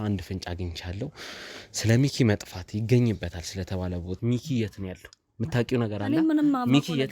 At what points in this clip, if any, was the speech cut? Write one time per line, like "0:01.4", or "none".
0:04.2